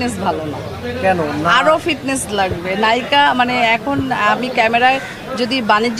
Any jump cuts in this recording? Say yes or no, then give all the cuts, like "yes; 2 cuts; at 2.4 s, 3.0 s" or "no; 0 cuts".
no; 0 cuts